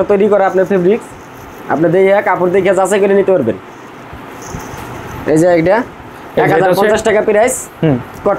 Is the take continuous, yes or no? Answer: yes